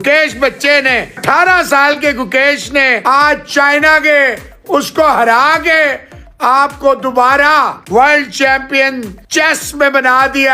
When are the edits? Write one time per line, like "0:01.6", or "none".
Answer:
0:01.2
0:03.0
0:07.8
0:09.1